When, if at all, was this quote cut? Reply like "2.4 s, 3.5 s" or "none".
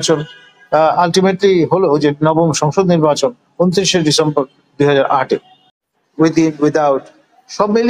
6.0 s